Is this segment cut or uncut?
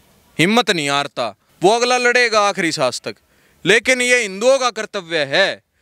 cut